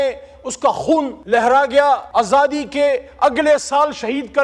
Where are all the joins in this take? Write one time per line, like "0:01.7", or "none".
0:01.2
0:02.1